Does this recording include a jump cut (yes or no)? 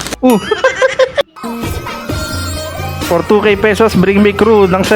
yes